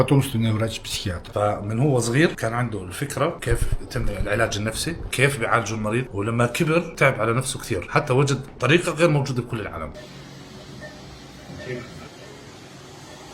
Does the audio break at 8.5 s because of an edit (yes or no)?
no